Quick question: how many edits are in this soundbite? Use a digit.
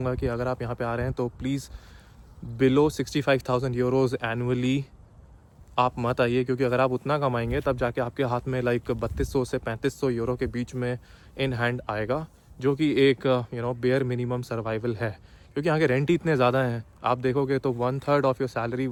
0